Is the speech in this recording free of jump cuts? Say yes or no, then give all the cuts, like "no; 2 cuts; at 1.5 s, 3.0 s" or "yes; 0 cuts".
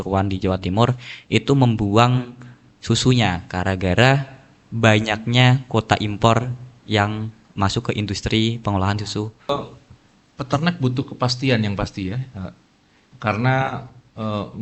no; 1 cut; at 9.5 s